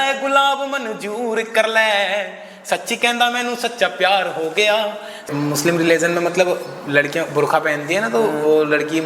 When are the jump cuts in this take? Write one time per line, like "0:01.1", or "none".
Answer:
0:05.3